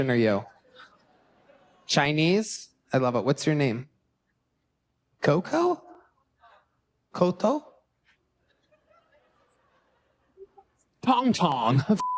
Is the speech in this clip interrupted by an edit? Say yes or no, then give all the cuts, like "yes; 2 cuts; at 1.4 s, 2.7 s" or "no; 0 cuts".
no; 0 cuts